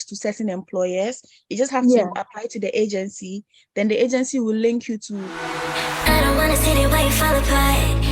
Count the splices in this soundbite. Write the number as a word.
one